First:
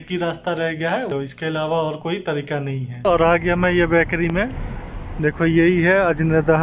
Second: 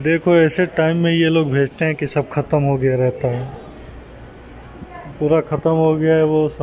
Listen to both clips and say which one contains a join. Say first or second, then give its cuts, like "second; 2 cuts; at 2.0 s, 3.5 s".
first; 2 cuts; at 1.1 s, 3.0 s